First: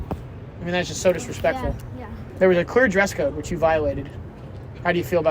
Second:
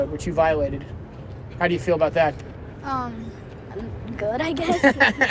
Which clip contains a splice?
first; 1 cut; at 2.3 s

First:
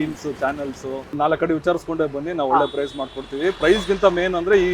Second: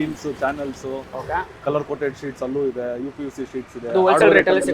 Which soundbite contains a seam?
first; 1 cut; at 1.1 s

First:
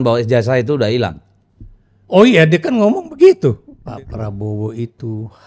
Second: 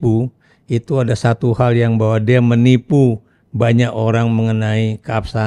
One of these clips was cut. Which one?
first; 1 cut; at 3.7 s

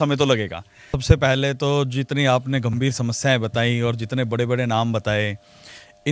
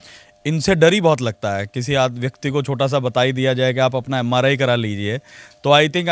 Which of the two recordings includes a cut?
first; 1 cut; at 1.0 s

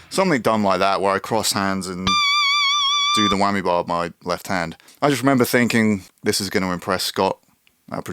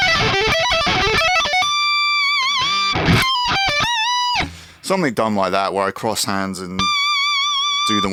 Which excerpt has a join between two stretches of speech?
first; 2 cuts; at 4.8 s, 6.1 s

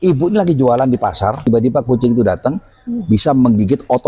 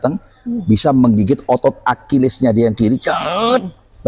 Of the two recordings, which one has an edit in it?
first; 1 cut; at 1.4 s

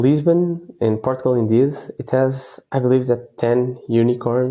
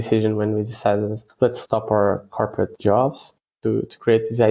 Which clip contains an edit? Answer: second; 3 cuts; at 1.3 s, 2.7 s, 3.5 s

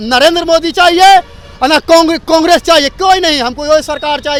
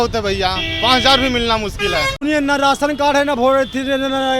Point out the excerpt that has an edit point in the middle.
second; 1 cut; at 2.2 s

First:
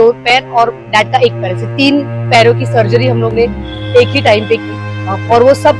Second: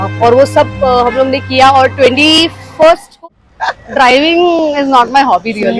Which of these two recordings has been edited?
second; 1 cut; at 3.2 s

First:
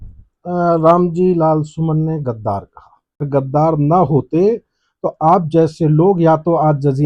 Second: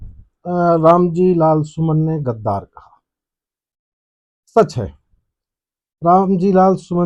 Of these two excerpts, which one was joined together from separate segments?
first; 1 cut; at 3.3 s

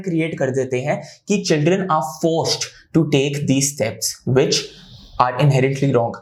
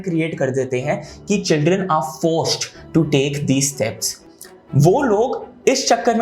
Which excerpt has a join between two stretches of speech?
second; 1 cut; at 4.2 s

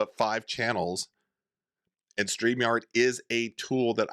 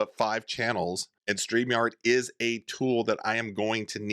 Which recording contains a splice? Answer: second; 1 cut; at 1.1 s

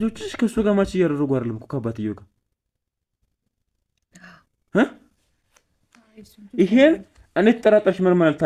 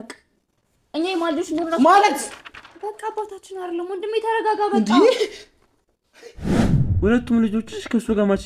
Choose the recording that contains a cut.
second; 1 cut; at 6.6 s

